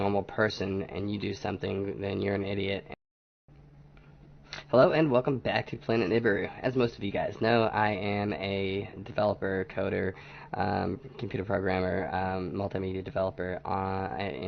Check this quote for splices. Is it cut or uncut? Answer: uncut